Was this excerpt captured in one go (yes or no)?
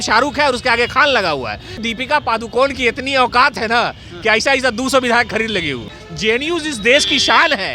no